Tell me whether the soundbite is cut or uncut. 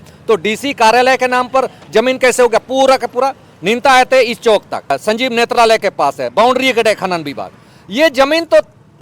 cut